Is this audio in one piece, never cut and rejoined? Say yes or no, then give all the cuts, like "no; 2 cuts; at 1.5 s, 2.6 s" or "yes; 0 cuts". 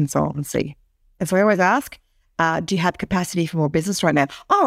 no; 1 cut; at 1.2 s